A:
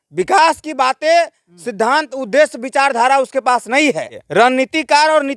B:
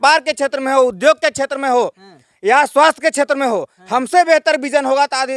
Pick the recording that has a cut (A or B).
A